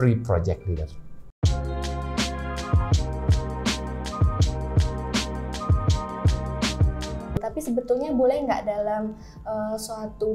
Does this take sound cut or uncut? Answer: uncut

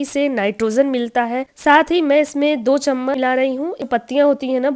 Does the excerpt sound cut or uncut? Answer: cut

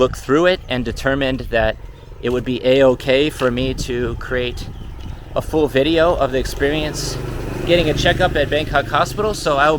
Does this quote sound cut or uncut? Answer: uncut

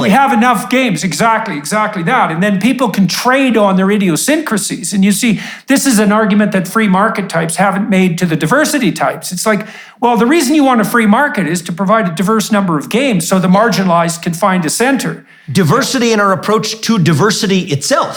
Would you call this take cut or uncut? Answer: uncut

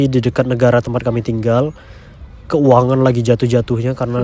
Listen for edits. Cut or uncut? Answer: uncut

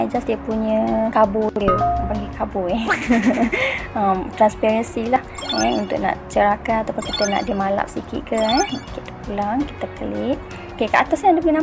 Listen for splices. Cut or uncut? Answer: uncut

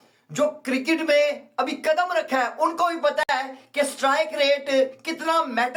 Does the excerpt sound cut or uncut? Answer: uncut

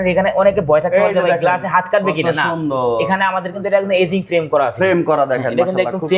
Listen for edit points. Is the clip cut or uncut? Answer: uncut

